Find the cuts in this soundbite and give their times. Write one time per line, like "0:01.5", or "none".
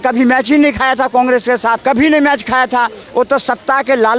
0:01.8